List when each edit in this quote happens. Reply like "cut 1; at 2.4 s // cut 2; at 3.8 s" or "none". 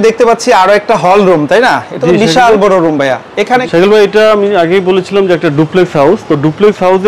cut 1; at 3.6 s